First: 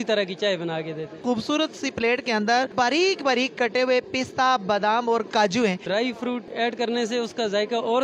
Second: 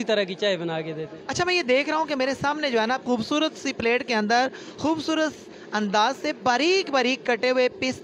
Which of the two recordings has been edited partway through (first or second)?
first